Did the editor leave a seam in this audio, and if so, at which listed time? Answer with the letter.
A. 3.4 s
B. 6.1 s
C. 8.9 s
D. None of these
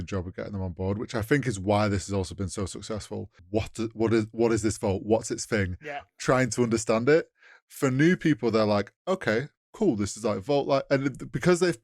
A